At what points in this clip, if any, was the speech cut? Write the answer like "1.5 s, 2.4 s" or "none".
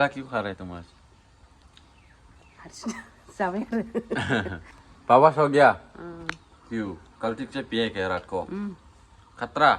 none